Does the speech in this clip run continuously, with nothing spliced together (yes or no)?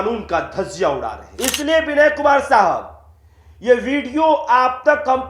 no